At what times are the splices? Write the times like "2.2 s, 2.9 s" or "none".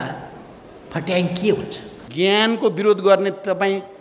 2.1 s